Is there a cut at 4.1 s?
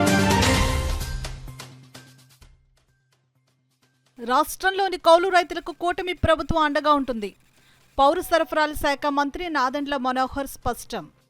yes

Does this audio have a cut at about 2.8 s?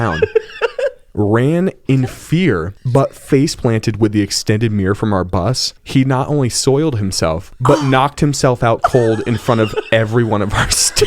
yes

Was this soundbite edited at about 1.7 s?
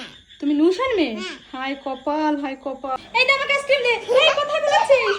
no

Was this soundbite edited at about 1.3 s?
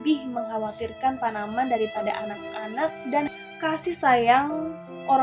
no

